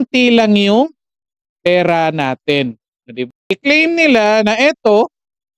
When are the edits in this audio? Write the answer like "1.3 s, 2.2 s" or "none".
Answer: 3.3 s